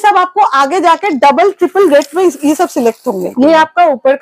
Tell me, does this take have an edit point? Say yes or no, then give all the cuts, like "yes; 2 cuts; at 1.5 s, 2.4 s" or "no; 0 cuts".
yes; 1 cut; at 3.3 s